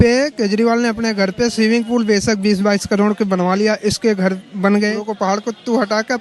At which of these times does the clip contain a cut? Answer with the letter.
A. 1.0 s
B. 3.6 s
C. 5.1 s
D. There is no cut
C